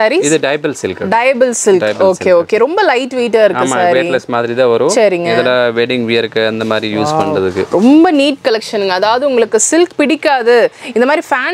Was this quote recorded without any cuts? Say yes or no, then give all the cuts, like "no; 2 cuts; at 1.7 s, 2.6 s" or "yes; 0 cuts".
yes; 0 cuts